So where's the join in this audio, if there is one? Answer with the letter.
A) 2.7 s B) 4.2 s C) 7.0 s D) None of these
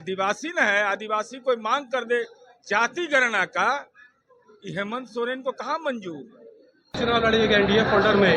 C